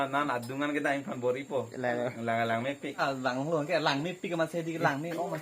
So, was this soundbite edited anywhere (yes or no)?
yes